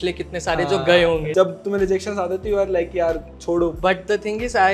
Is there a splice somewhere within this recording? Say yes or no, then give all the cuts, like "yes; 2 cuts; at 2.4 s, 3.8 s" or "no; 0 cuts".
yes; 2 cuts; at 1.3 s, 3.8 s